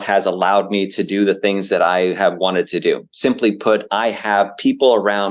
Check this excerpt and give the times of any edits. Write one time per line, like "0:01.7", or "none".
none